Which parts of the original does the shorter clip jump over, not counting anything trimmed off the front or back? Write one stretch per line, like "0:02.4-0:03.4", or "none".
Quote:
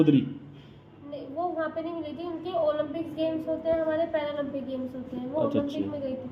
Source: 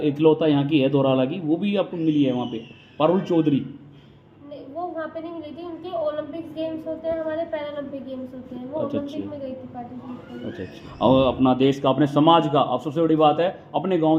none